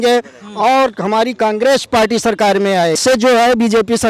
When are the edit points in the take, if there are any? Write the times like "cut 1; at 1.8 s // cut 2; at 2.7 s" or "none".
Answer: cut 1; at 3.0 s